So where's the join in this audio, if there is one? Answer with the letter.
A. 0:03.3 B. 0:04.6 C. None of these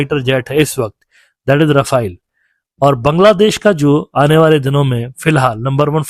C